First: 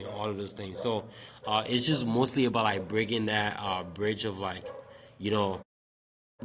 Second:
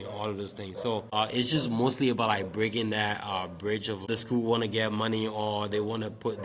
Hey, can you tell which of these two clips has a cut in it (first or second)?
second